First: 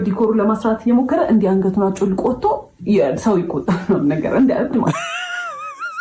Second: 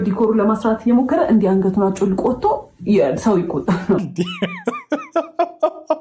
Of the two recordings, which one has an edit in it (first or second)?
second